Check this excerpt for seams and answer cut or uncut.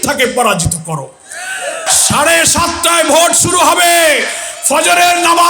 cut